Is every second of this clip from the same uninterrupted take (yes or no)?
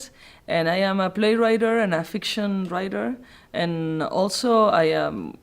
no